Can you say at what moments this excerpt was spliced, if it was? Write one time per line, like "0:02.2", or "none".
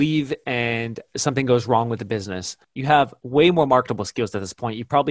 0:03.0